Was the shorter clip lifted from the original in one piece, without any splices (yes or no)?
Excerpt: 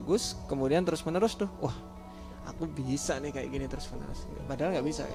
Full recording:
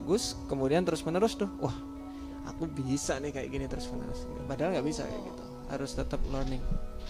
yes